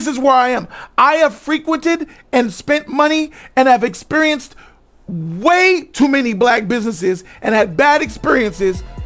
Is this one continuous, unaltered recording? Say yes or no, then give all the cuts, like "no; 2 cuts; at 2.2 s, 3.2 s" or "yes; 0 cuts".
yes; 0 cuts